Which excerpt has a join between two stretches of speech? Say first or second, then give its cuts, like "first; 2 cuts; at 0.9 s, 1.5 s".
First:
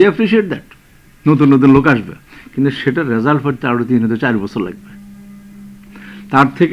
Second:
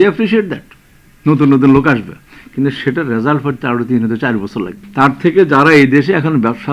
second; 1 cut; at 4.8 s